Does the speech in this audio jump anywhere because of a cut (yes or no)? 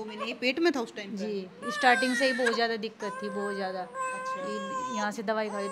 no